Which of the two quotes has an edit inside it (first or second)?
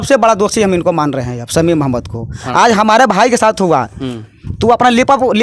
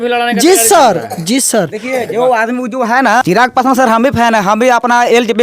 second